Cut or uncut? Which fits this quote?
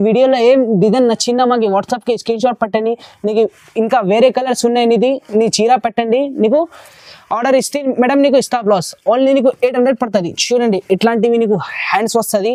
uncut